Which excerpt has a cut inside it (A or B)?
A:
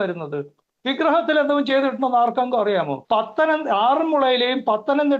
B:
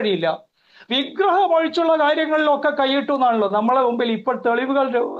A